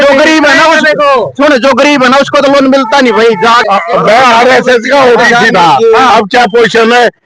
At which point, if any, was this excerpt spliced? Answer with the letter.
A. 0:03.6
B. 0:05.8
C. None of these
A